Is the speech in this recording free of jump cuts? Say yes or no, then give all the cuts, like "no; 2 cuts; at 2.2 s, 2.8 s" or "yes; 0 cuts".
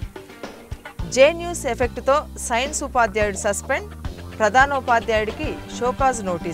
no; 1 cut; at 1.1 s